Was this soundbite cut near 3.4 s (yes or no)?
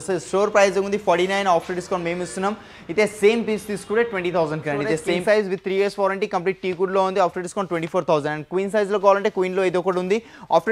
no